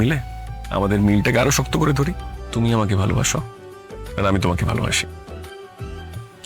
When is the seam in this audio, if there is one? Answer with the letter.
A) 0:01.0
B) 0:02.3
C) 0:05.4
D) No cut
B